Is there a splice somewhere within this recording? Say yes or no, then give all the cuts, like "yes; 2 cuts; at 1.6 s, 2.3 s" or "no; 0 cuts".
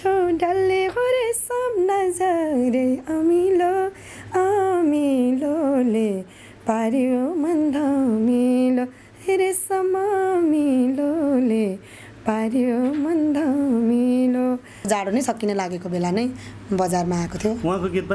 yes; 1 cut; at 14.8 s